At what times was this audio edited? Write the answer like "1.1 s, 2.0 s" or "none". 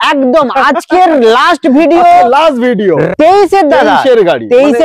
3.1 s